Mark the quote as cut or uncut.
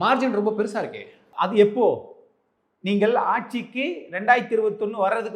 cut